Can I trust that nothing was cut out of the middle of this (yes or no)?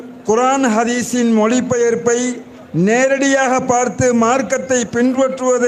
yes